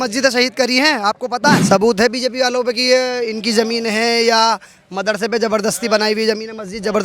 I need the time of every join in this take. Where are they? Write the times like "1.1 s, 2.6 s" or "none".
1.6 s